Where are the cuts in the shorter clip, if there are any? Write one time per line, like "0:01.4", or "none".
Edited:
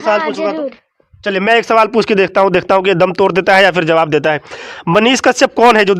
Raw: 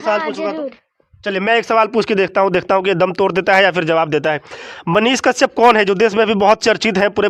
none